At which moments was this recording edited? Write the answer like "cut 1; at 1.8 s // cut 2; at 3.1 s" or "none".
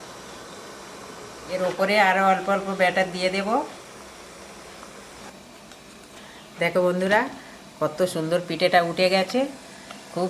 cut 1; at 1.5 s // cut 2; at 5.3 s